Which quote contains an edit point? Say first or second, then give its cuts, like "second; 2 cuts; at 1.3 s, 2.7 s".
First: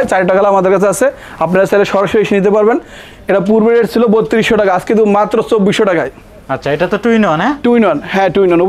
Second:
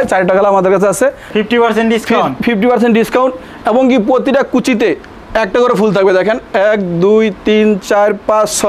second; 1 cut; at 1.3 s